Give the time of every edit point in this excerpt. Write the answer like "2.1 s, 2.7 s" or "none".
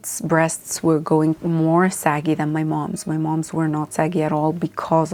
none